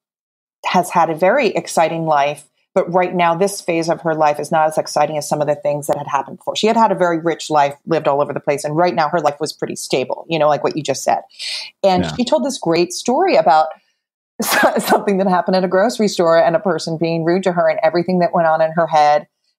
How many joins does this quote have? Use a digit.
0